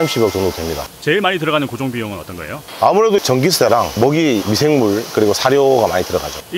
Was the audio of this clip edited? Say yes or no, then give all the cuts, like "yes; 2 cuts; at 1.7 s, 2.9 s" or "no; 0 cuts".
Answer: no; 0 cuts